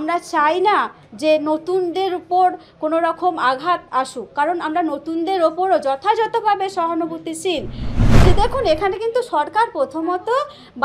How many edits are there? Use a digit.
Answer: 1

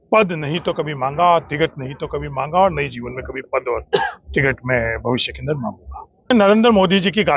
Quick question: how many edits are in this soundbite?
1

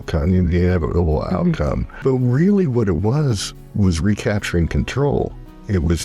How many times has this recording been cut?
1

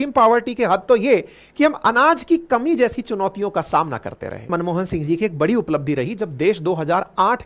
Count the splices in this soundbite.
1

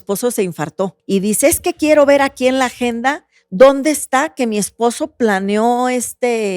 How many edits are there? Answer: 1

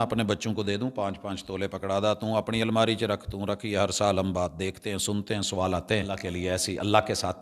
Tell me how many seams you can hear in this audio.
1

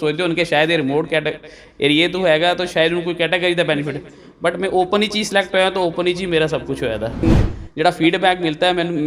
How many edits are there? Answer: 1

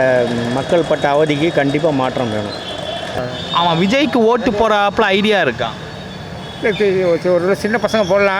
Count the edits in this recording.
1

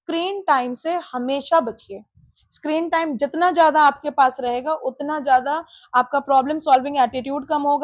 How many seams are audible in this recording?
0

